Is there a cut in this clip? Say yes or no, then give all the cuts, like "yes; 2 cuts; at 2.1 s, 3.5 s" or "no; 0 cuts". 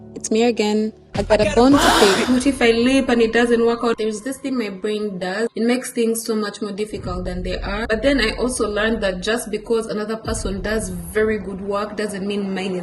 yes; 3 cuts; at 2.3 s, 4.0 s, 7.8 s